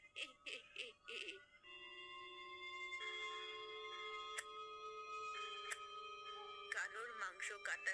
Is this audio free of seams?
no; 2 cuts; at 1.7 s, 6.7 s

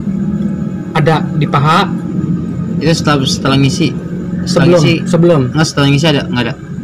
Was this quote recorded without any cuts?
yes; 0 cuts

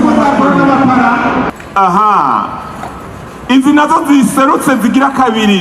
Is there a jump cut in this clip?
yes; 1 cut; at 1.5 s

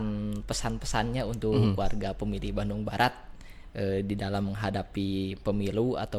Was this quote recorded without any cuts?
yes; 0 cuts

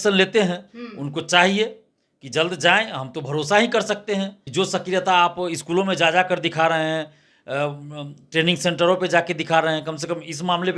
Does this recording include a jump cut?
yes; 1 cut; at 4.4 s

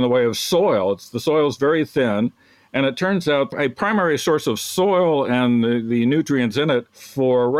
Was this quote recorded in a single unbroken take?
yes; 0 cuts

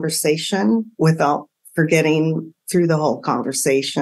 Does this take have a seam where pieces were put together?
no; 0 cuts

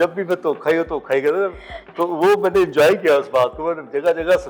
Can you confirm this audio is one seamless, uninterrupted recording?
yes; 0 cuts

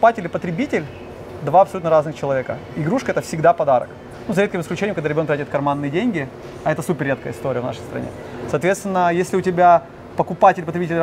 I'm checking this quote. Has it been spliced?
no; 0 cuts

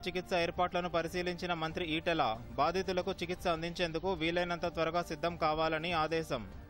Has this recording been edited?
no; 0 cuts

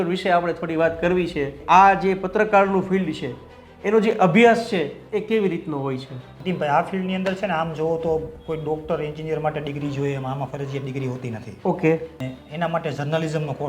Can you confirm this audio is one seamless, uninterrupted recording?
no; 3 cuts; at 1.6 s, 6.2 s, 12.2 s

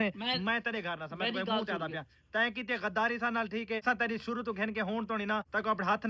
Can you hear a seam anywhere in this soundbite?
no; 0 cuts

